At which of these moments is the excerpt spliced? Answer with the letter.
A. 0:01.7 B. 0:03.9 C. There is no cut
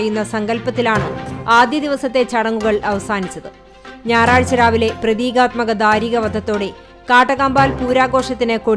C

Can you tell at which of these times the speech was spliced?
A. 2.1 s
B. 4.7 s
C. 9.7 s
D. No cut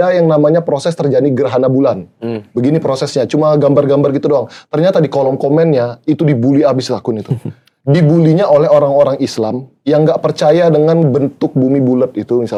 D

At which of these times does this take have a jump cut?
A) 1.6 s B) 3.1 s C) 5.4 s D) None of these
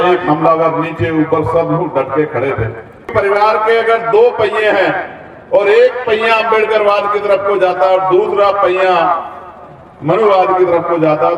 B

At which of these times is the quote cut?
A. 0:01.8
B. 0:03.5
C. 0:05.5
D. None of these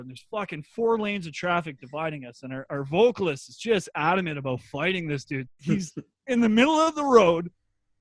C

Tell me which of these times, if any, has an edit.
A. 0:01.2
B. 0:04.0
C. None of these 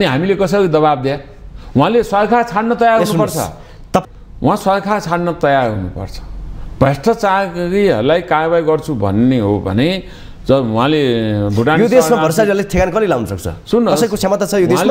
B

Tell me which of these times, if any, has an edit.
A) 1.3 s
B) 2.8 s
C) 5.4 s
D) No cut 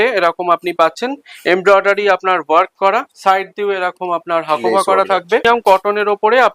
C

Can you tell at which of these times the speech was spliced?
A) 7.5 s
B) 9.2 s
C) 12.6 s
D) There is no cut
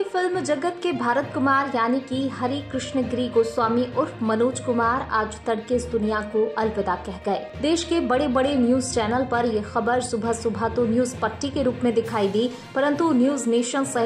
D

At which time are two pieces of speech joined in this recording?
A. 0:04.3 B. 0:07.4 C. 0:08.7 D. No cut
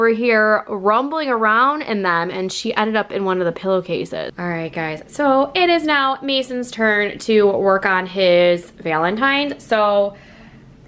A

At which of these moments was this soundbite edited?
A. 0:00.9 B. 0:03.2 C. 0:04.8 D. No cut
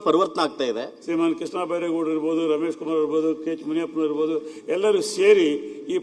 A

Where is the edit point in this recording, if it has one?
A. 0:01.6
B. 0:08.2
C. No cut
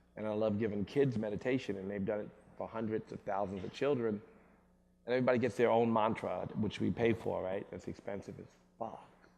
A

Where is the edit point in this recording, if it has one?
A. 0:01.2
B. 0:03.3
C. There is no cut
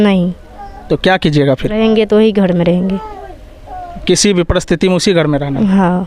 C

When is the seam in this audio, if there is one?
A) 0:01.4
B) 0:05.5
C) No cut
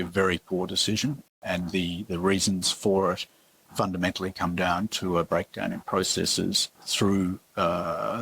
A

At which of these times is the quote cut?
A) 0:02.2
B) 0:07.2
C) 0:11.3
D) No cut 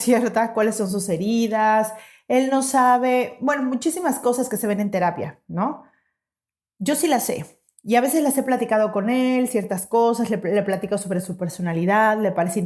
D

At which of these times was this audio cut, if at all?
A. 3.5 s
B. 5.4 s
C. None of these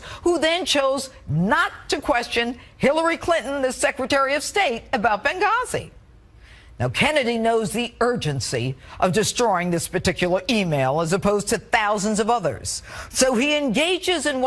B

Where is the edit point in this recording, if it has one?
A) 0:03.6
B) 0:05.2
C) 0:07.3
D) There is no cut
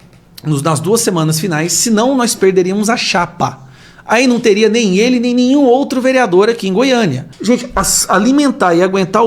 C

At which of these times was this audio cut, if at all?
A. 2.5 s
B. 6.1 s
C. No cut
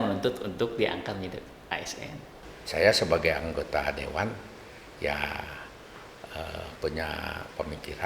A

